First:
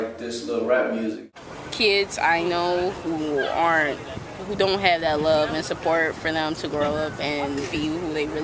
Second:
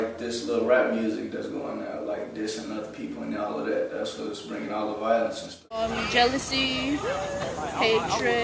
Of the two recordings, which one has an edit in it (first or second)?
first